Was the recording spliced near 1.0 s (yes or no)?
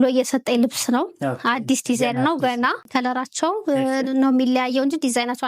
no